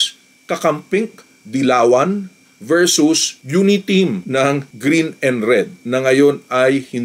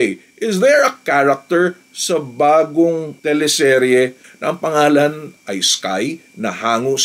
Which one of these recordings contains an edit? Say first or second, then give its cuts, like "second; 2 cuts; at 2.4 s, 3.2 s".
second; 2 cuts; at 4.2 s, 5.4 s